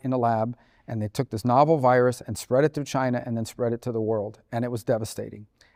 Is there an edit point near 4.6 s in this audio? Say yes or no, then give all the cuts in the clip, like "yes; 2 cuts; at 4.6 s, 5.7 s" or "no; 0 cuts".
no; 0 cuts